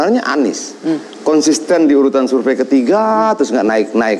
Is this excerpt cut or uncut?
uncut